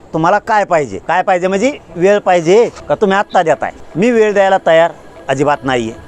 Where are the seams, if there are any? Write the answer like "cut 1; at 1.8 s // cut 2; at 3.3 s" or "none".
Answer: cut 1; at 1.0 s // cut 2; at 2.8 s // cut 3; at 3.8 s